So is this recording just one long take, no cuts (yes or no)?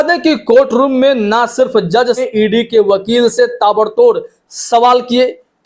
no